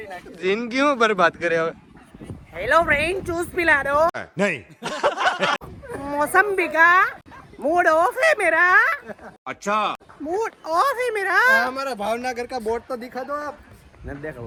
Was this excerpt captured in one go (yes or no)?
yes